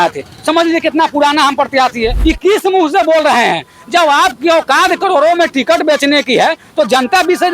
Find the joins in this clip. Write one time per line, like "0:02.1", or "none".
0:02.2